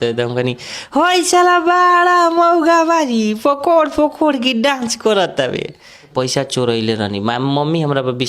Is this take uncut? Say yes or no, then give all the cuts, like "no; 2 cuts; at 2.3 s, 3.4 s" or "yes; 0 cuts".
no; 1 cut; at 6.1 s